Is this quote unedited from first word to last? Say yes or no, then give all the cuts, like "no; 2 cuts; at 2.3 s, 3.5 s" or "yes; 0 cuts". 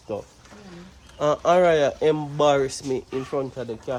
yes; 0 cuts